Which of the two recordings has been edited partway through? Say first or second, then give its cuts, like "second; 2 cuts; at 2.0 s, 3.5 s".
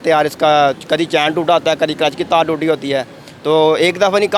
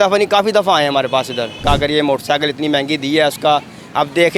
second; 1 cut; at 1.6 s